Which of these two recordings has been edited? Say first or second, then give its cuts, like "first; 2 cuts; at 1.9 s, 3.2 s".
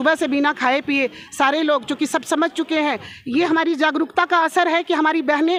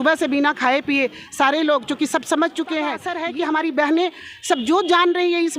second; 1 cut; at 3.2 s